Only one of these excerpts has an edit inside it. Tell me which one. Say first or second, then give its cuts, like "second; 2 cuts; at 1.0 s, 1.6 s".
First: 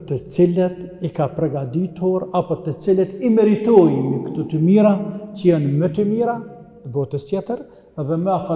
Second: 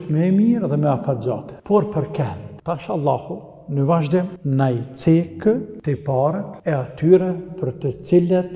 second; 5 cuts; at 1.5 s, 2.5 s, 4.4 s, 5.7 s, 6.5 s